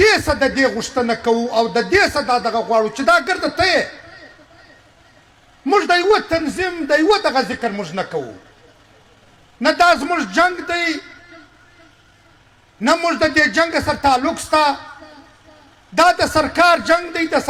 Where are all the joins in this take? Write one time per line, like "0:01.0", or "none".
none